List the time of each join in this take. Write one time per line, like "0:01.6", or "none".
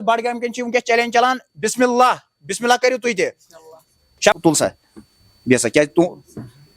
0:04.3